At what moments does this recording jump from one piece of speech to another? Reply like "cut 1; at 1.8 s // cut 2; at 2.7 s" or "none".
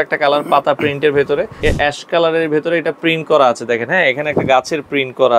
cut 1; at 1.6 s